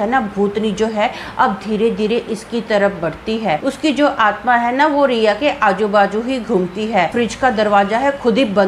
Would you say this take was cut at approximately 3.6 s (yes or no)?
yes